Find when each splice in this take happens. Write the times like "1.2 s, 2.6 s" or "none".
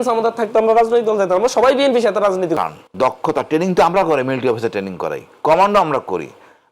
2.6 s